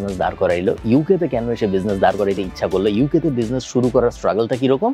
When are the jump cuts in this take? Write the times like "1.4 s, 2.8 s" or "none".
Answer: none

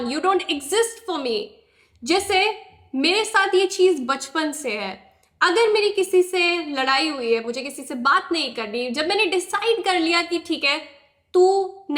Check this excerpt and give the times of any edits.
none

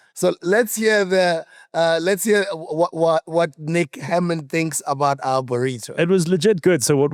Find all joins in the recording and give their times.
none

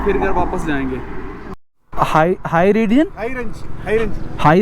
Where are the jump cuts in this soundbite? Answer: 1.5 s

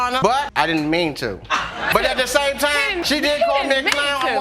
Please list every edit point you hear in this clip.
1.9 s

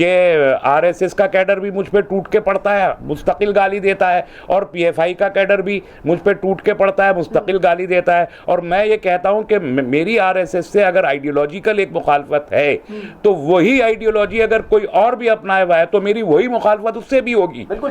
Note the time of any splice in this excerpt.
none

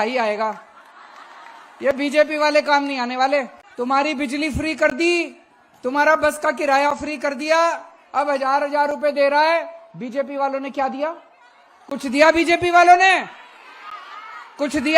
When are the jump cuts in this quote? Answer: 3.6 s

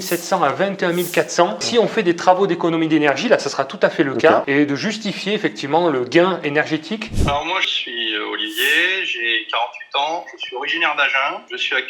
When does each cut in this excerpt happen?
7.1 s

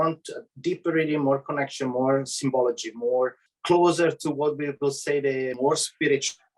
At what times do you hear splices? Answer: 3.5 s, 5.5 s

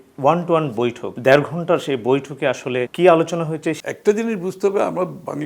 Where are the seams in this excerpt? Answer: 1.1 s, 2.9 s, 3.8 s

